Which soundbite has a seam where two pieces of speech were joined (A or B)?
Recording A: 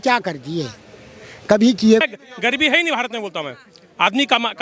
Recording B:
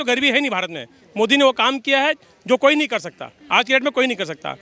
A